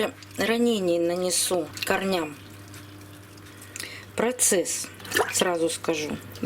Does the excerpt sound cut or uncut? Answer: cut